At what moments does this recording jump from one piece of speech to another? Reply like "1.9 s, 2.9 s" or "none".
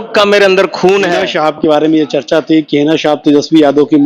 1.1 s